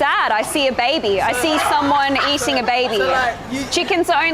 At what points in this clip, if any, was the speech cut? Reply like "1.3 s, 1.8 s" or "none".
none